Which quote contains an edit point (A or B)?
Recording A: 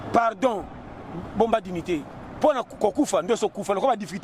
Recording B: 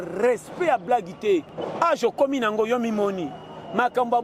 B